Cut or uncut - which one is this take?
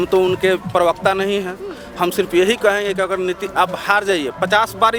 uncut